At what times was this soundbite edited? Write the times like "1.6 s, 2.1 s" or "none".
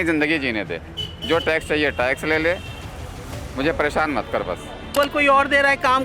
4.9 s